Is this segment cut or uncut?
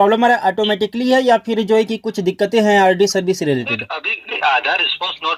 uncut